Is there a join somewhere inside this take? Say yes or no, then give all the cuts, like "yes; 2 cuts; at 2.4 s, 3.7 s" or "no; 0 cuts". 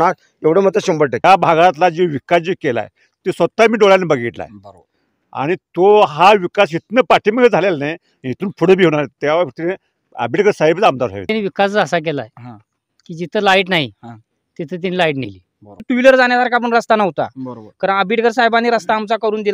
yes; 3 cuts; at 1.2 s, 11.3 s, 15.8 s